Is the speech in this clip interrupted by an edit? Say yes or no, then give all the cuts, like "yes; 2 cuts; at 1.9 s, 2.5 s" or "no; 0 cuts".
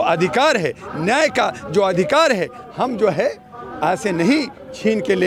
no; 0 cuts